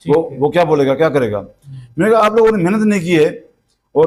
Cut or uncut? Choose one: uncut